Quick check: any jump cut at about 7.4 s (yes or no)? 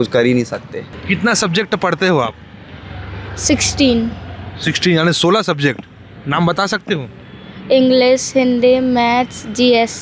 no